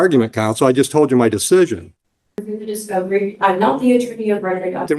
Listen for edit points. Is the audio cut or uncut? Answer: cut